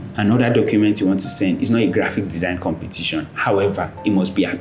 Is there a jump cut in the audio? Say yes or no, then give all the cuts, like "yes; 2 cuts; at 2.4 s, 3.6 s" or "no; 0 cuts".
no; 0 cuts